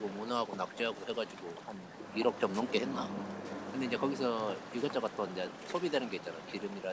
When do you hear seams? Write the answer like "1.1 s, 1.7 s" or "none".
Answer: none